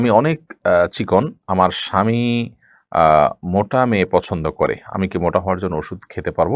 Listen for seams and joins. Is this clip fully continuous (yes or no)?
yes